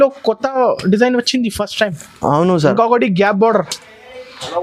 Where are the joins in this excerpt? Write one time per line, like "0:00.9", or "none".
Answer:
none